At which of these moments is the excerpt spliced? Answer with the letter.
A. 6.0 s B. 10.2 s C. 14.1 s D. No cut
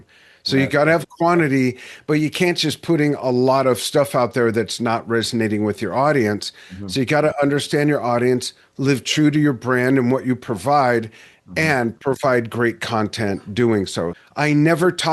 C